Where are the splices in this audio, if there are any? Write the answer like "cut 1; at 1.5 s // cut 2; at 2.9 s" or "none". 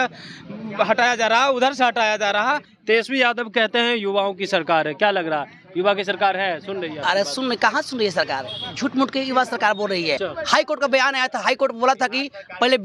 cut 1; at 2.7 s // cut 2; at 10.2 s